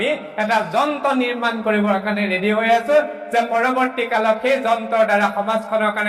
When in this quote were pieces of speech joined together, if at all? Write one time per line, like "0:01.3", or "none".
none